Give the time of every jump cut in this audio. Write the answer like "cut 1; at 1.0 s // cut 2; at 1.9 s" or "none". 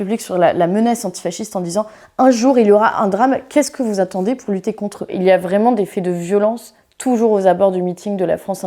cut 1; at 5.0 s